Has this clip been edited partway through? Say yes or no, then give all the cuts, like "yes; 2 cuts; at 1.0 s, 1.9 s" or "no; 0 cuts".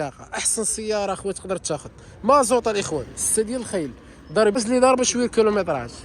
yes; 1 cut; at 4.6 s